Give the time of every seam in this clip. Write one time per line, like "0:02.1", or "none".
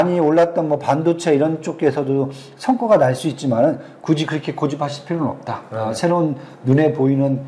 none